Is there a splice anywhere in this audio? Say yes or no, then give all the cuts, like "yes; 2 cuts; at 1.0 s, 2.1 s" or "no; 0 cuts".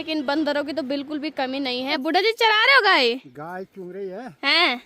yes; 1 cut; at 2.0 s